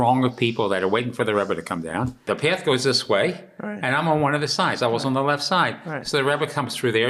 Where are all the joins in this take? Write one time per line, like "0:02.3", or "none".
0:02.2